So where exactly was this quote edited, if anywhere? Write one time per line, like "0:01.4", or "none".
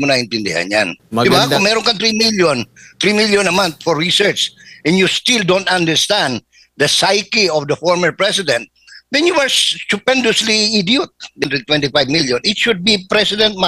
0:01.0
0:11.4